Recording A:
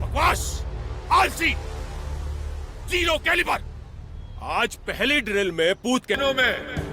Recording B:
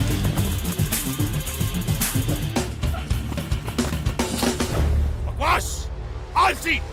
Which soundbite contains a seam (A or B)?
A